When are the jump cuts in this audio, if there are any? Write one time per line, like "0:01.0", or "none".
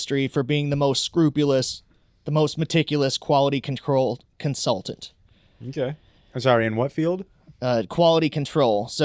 none

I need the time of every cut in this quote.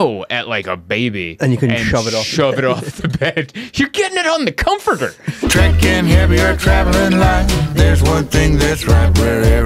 0:05.4

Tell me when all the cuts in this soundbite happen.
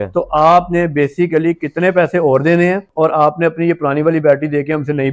none

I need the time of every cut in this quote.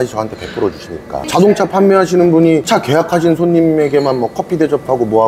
0:01.3

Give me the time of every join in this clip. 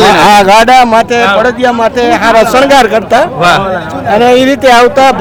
none

